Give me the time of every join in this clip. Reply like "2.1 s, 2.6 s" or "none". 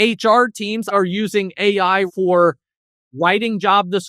0.9 s, 2.1 s